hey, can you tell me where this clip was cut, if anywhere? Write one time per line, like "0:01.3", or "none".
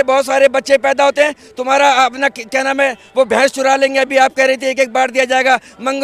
none

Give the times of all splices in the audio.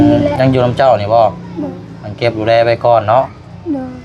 none

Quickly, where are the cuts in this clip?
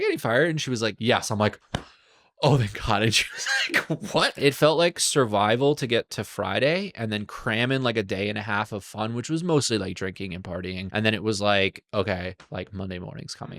0:01.0
0:04.3
0:10.8

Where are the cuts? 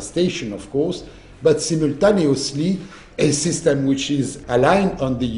none

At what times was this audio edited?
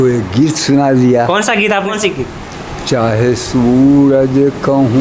0:01.9

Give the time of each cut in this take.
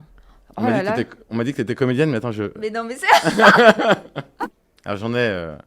0:04.6

